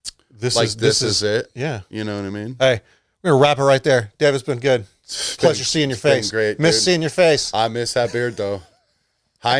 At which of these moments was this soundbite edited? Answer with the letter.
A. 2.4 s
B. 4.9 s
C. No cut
C